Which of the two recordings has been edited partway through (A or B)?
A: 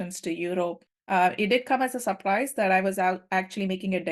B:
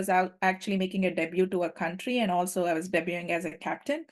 A